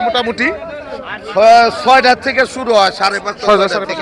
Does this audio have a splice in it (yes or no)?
no